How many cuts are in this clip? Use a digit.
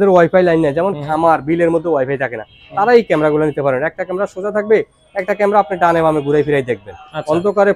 0